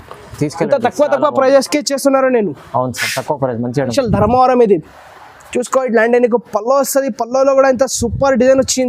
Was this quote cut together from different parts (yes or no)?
yes